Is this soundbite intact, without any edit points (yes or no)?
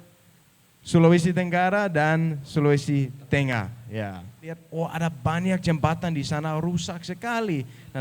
no